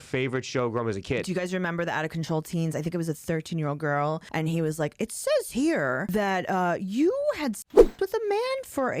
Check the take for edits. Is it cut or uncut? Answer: cut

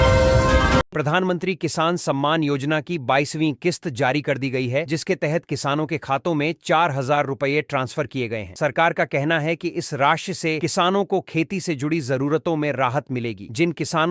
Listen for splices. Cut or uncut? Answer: cut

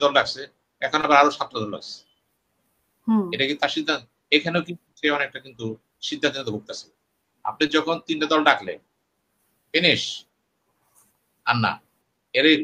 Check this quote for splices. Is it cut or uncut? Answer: uncut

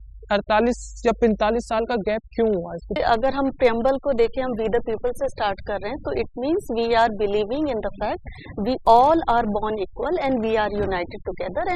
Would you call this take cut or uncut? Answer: cut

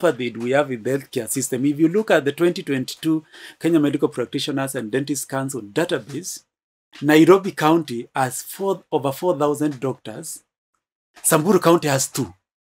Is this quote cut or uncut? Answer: uncut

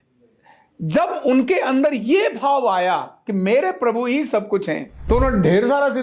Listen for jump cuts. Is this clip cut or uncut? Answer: cut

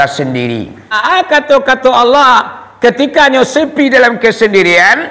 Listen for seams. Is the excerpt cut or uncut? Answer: cut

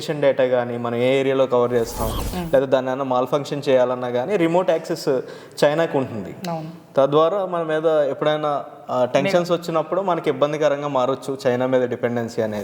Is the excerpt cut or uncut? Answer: uncut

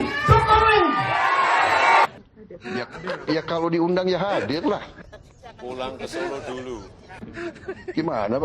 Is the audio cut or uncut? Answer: cut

